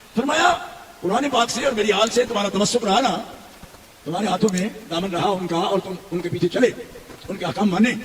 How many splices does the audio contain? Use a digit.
0